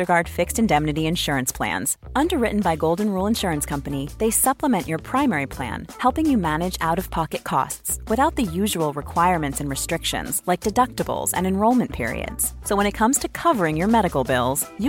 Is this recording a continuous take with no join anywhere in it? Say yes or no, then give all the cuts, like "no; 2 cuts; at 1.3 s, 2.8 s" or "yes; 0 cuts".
yes; 0 cuts